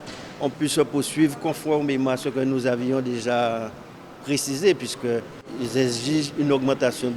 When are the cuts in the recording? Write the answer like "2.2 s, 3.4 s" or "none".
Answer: 5.5 s